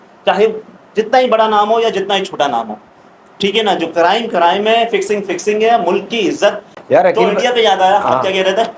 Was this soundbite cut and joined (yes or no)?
yes